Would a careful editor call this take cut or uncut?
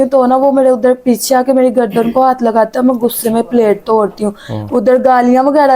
uncut